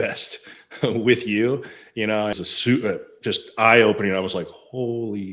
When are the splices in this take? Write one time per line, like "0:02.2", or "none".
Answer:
0:02.3